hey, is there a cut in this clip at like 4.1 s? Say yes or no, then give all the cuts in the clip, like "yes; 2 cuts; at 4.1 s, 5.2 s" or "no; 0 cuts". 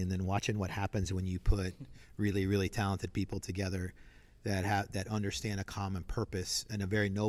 no; 0 cuts